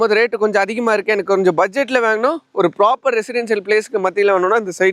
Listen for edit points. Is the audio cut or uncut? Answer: uncut